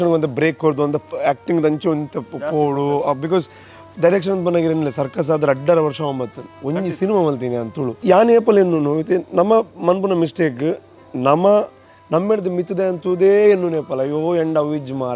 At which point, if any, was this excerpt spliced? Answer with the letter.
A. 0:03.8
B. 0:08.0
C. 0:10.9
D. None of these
B